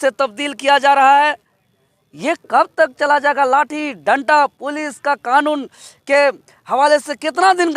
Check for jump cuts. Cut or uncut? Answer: uncut